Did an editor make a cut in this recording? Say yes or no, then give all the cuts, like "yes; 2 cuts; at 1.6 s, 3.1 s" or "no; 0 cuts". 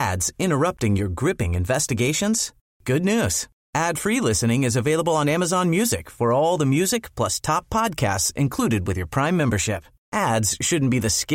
no; 0 cuts